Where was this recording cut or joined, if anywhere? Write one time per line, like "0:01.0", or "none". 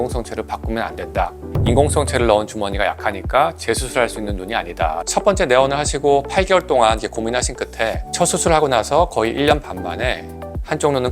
0:01.5
0:05.0
0:08.2